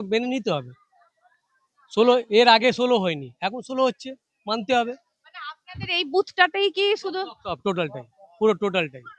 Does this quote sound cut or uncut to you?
uncut